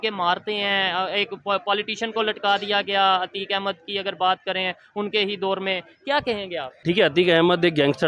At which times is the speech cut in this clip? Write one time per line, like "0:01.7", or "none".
0:06.8